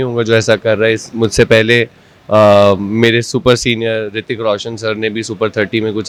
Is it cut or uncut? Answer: uncut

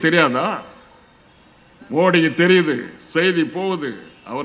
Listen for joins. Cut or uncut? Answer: uncut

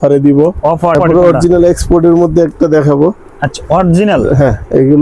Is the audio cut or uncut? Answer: cut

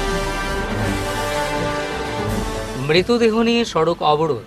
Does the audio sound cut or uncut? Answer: uncut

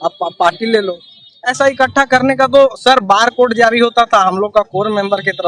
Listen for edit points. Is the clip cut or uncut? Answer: cut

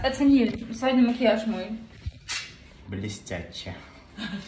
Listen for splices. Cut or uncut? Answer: uncut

